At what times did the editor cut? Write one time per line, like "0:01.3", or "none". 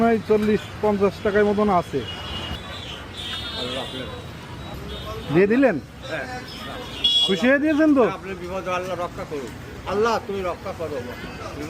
0:02.6
0:04.8